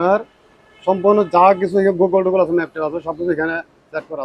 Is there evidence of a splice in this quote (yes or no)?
no